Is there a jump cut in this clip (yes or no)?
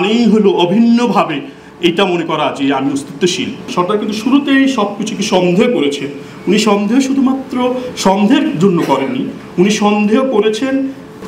yes